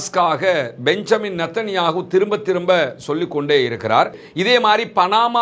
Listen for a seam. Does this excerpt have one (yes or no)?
yes